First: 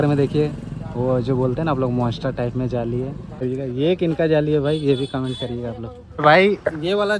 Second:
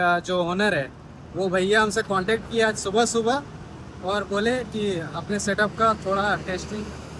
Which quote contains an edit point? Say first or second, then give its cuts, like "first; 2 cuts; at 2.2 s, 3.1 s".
first; 2 cuts; at 3.4 s, 6.2 s